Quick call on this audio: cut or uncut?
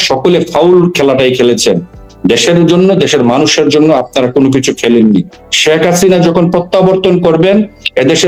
uncut